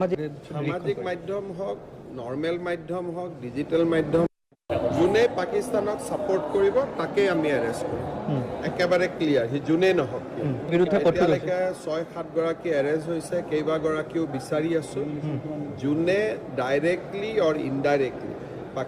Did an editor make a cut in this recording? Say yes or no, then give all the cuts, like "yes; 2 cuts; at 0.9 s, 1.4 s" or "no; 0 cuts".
yes; 1 cut; at 4.3 s